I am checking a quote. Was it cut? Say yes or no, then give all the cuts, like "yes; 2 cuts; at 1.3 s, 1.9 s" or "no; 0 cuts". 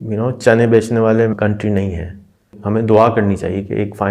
yes; 2 cuts; at 1.3 s, 2.5 s